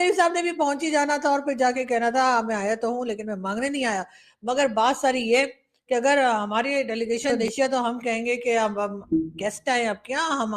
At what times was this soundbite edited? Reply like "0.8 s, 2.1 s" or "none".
7.4 s